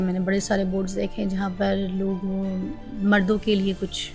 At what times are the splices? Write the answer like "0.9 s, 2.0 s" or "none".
none